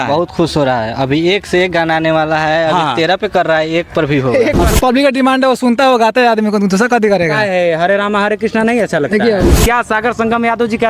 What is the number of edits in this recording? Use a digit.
2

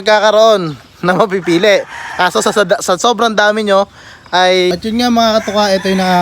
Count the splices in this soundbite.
1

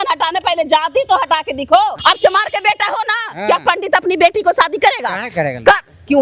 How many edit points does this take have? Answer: 1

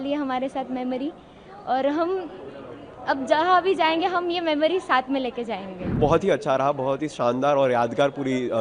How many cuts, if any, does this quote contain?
1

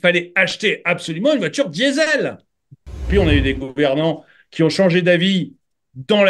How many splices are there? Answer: 1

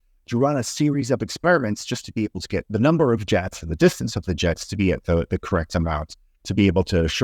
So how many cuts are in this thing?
1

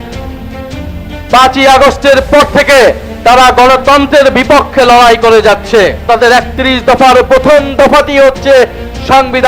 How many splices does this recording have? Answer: 1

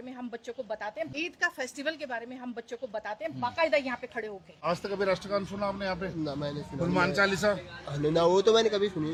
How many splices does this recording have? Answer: 0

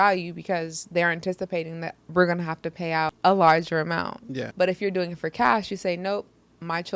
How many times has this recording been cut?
2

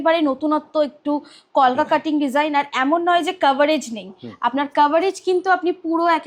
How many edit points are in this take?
0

